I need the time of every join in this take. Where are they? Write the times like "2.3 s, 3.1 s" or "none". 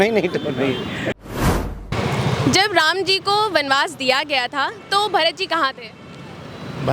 1.4 s